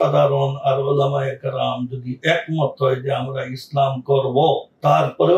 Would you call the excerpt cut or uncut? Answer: uncut